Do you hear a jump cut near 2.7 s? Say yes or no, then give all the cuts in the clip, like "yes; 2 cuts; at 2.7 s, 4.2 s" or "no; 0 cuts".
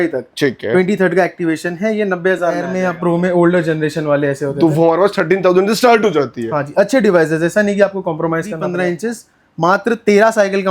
yes; 2 cuts; at 2.7 s, 8.7 s